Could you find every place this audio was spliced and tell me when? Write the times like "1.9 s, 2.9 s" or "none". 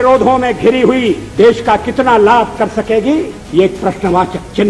1.2 s, 3.4 s